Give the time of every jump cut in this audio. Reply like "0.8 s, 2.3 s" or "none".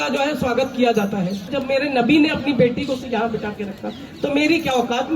1.6 s